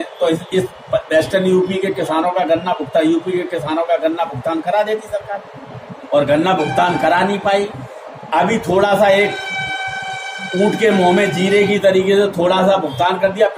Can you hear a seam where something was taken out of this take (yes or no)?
no